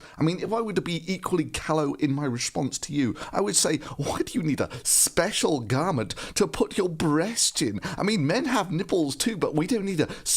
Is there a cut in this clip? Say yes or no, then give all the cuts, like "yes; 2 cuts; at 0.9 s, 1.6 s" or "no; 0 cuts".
yes; 1 cut; at 8.1 s